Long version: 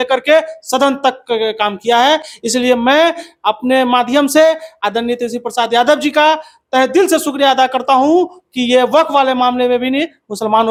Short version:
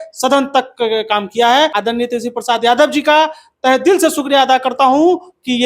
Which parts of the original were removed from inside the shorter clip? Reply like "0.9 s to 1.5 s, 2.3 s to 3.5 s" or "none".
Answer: 2.3 s to 4.8 s